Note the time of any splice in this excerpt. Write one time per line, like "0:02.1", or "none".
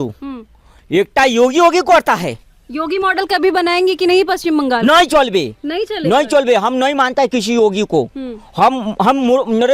none

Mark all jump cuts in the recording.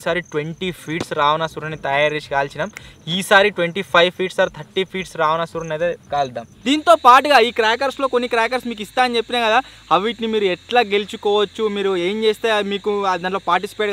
0:06.5

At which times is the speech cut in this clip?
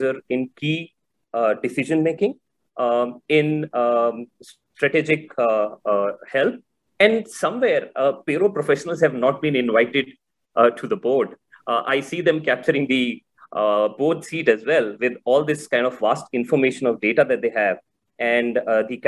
none

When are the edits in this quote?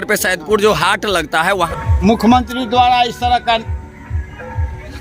0:01.8

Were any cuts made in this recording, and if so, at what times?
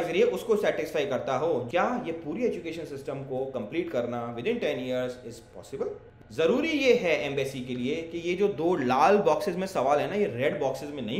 0:01.6
0:06.1

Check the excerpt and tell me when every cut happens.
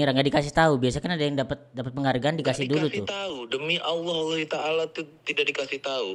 none

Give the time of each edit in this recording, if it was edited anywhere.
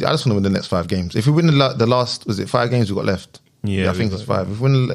none

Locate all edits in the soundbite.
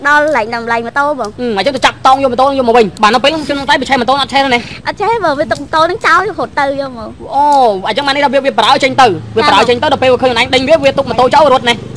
0:01.3
0:02.9

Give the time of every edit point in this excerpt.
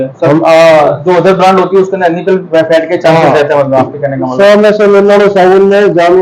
0:04.3

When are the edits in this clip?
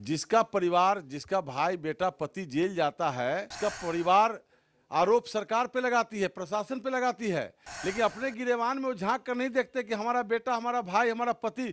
0:03.5

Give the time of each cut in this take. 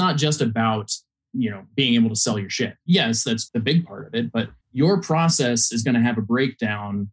0:02.8
0:03.5
0:04.6

